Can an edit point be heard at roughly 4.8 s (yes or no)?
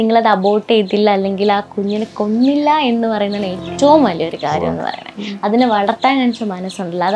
no